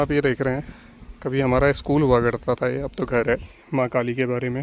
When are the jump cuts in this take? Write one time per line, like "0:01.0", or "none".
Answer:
0:03.6